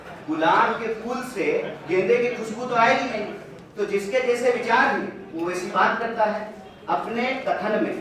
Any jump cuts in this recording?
no; 0 cuts

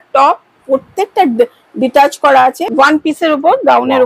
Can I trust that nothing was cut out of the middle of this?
no; 1 cut; at 2.6 s

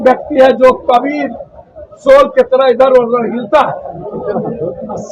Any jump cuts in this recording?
no; 0 cuts

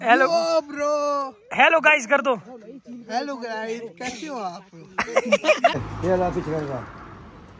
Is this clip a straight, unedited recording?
no; 1 cut; at 5.9 s

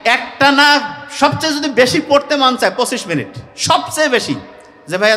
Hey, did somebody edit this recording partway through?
no; 0 cuts

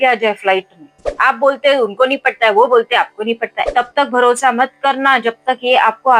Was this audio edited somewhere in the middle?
yes; 2 cuts; at 1.1 s, 3.7 s

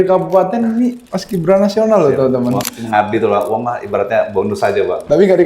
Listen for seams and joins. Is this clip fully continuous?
no; 1 cut; at 2.7 s

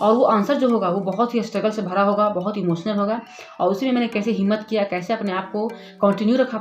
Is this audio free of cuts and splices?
yes; 0 cuts

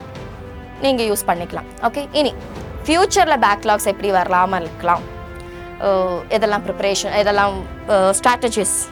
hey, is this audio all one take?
yes; 0 cuts

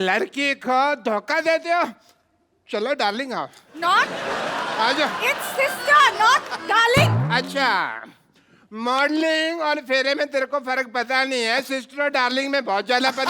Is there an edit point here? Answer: no; 0 cuts

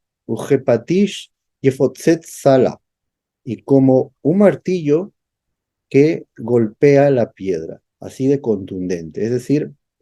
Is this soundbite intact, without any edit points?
yes; 0 cuts

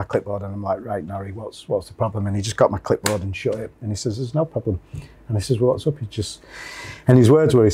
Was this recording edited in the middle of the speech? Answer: no; 0 cuts

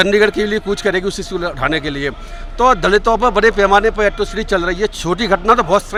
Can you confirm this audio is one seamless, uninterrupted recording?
yes; 0 cuts

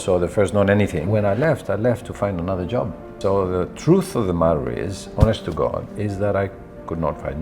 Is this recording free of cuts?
no; 2 cuts; at 1.0 s, 3.1 s

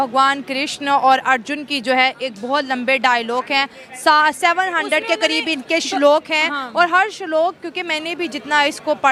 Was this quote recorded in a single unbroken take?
yes; 0 cuts

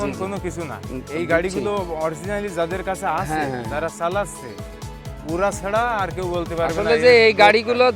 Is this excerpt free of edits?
yes; 0 cuts

